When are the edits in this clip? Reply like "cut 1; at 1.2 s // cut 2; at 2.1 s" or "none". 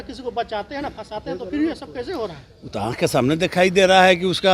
none

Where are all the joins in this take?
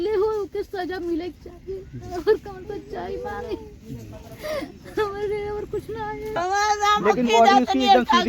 cut 1; at 6.3 s

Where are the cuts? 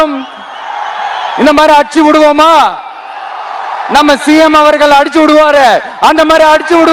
none

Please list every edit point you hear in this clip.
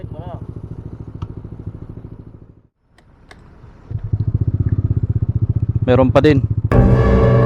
cut 1; at 2.5 s // cut 2; at 6.5 s

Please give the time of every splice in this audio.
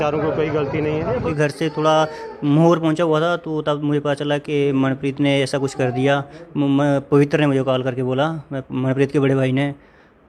cut 1; at 1.3 s

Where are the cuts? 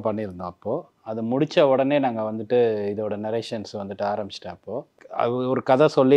cut 1; at 5.0 s

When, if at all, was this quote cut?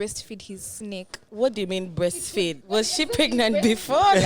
cut 1; at 1.2 s // cut 2; at 2.6 s

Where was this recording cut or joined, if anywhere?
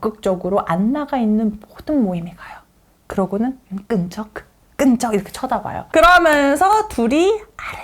cut 1; at 5.9 s

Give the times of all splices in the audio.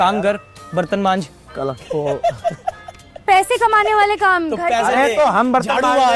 none

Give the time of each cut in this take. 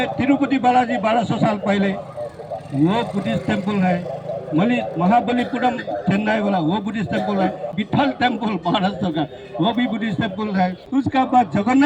cut 1; at 7.7 s // cut 2; at 10.8 s

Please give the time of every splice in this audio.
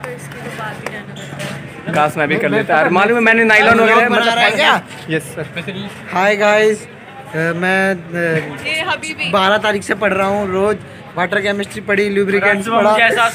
none

